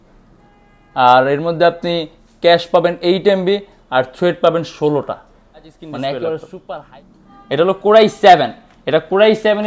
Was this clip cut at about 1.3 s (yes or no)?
no